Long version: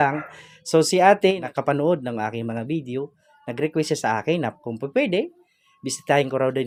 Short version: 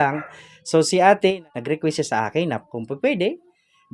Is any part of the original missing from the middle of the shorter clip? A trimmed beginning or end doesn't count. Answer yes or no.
yes